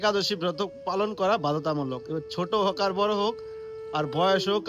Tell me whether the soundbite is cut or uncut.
uncut